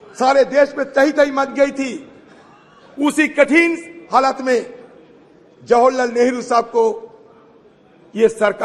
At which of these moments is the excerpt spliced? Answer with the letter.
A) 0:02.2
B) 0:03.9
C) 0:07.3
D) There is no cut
D